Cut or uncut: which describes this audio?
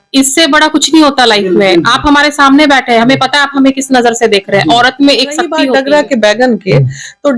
cut